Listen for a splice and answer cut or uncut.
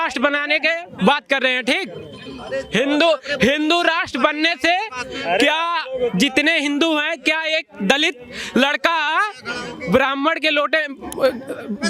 uncut